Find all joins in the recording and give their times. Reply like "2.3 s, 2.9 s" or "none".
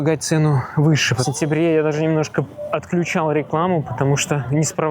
1.2 s